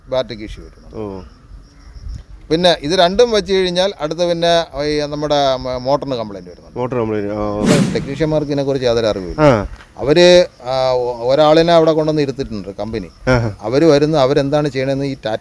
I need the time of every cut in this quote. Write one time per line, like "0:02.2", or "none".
0:07.7